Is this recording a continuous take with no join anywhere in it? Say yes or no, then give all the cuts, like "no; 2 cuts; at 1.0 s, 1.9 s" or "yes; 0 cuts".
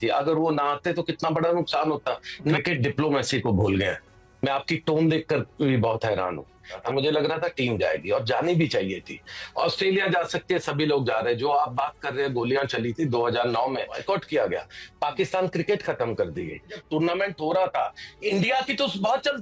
no; 4 cuts; at 2.6 s, 6.8 s, 14.0 s, 16.8 s